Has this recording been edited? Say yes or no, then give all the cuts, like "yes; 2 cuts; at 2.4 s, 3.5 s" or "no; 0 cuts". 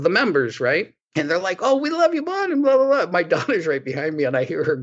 no; 0 cuts